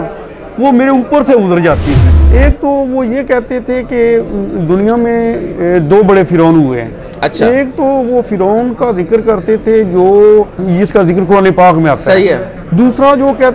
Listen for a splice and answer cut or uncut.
cut